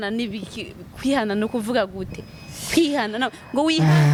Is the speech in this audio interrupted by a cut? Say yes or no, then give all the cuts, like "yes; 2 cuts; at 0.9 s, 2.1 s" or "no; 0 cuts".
no; 0 cuts